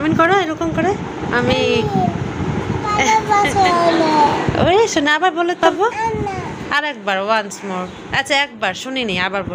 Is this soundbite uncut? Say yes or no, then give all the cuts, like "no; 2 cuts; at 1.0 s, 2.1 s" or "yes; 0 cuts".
yes; 0 cuts